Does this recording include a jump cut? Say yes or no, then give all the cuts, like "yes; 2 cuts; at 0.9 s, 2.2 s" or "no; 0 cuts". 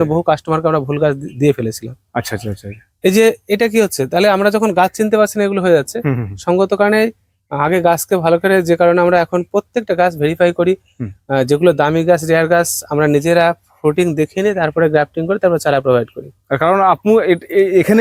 no; 0 cuts